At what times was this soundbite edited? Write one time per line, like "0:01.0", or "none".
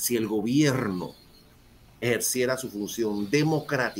none